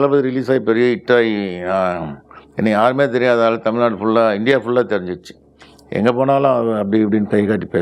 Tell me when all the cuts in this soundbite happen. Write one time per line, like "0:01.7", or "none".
none